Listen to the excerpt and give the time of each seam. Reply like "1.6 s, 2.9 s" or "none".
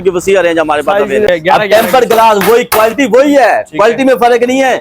1.3 s

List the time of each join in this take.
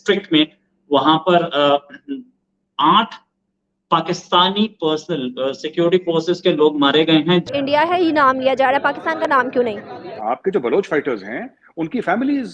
7.5 s, 10.1 s

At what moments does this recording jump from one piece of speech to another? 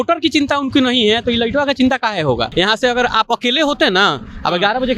2.5 s

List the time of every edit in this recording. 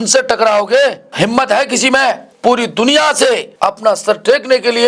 1.0 s, 2.3 s, 4.0 s

